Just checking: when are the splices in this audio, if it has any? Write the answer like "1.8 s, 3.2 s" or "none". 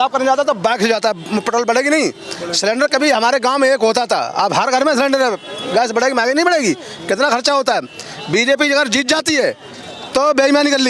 none